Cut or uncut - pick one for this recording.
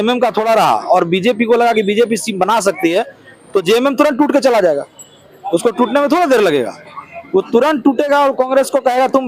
uncut